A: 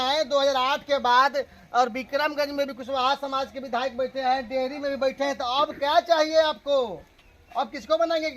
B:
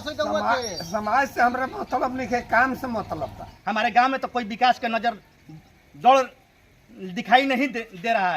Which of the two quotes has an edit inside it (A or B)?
B